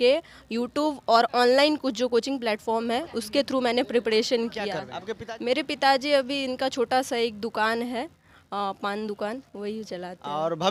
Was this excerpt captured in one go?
yes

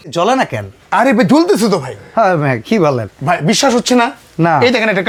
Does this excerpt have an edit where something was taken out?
no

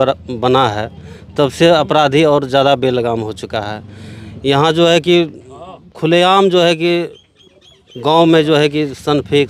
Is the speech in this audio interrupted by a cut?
no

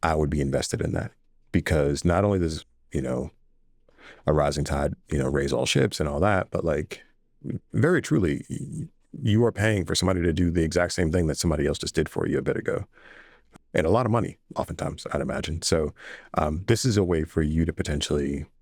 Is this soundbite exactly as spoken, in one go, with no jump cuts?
yes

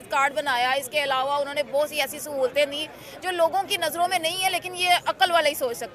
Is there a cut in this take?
no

